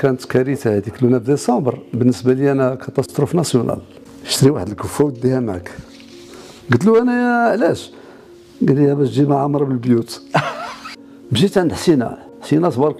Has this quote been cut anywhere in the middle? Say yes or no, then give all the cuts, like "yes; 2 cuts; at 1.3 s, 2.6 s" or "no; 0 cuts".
yes; 2 cuts; at 3.9 s, 10.9 s